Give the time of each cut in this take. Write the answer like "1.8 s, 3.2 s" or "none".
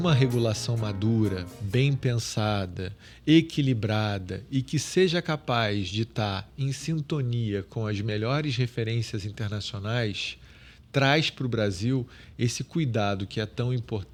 none